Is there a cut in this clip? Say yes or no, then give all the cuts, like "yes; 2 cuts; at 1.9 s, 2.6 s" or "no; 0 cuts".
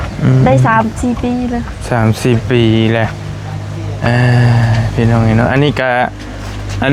no; 0 cuts